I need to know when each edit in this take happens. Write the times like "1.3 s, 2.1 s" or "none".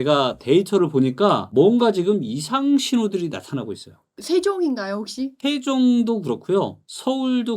4.2 s